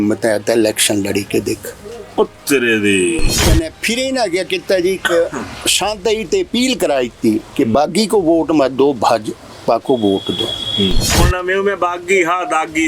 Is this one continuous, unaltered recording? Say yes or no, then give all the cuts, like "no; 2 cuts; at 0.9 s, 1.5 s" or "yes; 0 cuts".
no; 2 cuts; at 3.3 s, 11.1 s